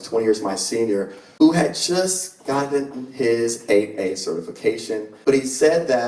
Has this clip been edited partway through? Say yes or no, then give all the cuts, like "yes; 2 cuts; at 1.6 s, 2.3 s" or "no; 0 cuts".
yes; 2 cuts; at 1.2 s, 5.1 s